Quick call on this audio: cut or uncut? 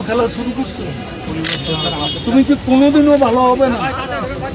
uncut